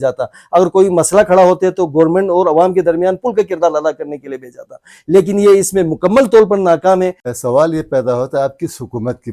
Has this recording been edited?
yes; 1 cut; at 7.2 s

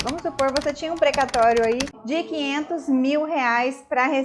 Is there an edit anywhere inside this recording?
yes; 1 cut; at 1.9 s

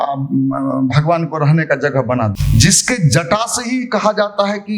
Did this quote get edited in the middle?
yes; 1 cut; at 2.4 s

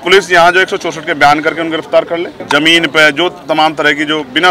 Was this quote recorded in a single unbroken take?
no; 1 cut; at 2.3 s

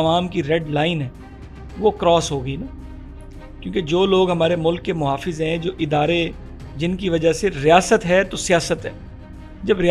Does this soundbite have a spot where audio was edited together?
no; 0 cuts

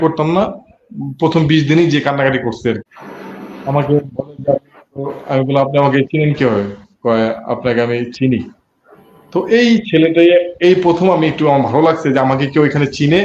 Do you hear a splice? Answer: yes; 1 cut; at 2.8 s

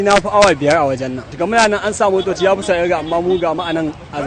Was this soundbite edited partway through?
no; 0 cuts

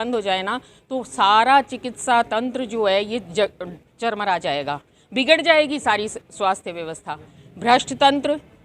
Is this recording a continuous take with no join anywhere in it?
no; 1 cut; at 7.4 s

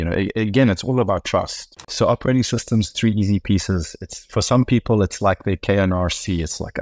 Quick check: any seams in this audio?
yes; 1 cut; at 1.9 s

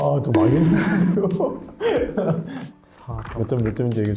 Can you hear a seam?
yes; 1 cut; at 2.6 s

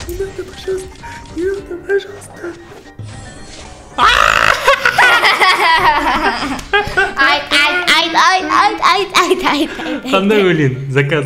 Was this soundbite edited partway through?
no; 0 cuts

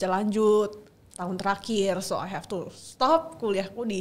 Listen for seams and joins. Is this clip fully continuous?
yes; 0 cuts

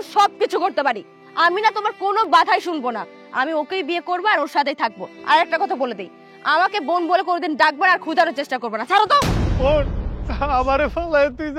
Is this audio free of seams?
no; 1 cut; at 1.2 s

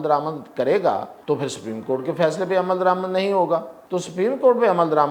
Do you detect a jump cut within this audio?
yes; 2 cuts; at 1.1 s, 3.8 s

